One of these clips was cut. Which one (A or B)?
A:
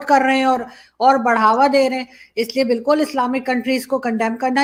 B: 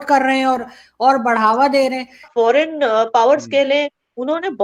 B